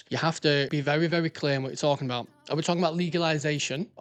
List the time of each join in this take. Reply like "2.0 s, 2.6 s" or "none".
none